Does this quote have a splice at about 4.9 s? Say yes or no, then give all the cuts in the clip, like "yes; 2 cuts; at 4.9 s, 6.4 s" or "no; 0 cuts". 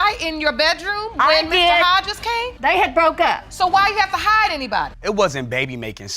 yes; 1 cut; at 4.9 s